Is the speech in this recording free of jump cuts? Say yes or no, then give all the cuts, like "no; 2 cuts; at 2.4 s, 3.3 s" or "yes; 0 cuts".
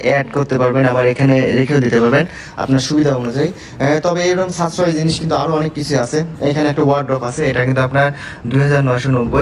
yes; 0 cuts